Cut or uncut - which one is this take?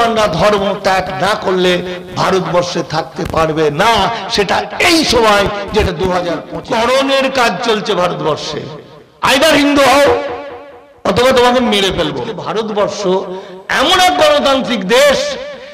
cut